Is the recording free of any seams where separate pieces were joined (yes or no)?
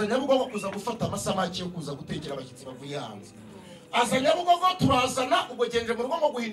yes